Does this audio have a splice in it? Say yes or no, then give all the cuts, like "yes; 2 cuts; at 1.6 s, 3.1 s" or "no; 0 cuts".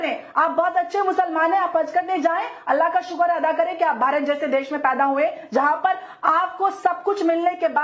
no; 0 cuts